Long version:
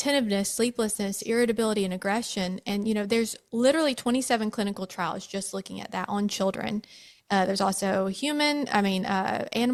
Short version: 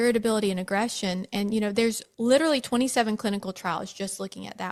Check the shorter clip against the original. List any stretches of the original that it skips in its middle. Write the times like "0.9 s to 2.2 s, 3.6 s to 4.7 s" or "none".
none